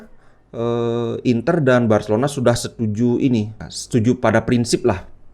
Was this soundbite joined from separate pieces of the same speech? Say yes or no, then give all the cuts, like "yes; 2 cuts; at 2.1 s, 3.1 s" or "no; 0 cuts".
yes; 1 cut; at 3.7 s